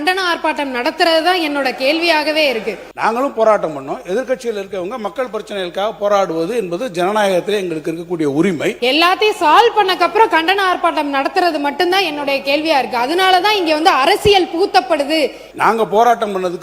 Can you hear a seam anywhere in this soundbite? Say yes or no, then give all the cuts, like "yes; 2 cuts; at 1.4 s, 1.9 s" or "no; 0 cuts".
yes; 3 cuts; at 2.8 s, 8.8 s, 15.5 s